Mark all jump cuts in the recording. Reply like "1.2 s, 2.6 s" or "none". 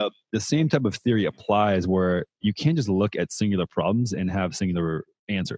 none